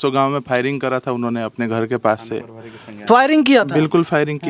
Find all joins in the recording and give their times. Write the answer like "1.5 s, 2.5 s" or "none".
none